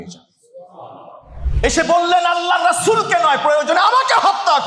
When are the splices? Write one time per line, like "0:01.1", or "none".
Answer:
0:01.3